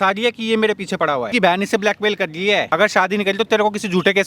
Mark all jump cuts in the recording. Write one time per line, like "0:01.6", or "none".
0:01.3
0:02.7